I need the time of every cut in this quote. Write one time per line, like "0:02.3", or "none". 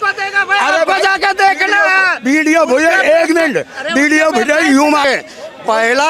0:05.0